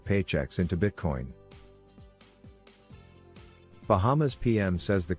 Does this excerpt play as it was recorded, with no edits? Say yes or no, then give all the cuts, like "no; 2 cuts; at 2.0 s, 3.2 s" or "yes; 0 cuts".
no; 2 cuts; at 1.4 s, 3.9 s